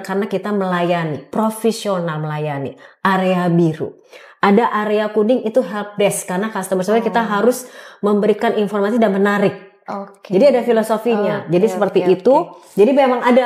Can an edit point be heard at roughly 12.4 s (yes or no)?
no